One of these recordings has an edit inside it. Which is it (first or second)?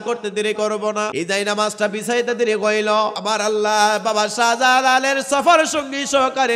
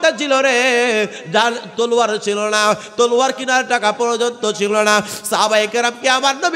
first